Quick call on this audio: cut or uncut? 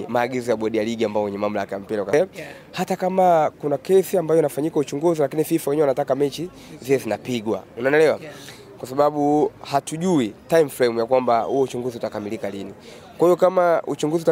cut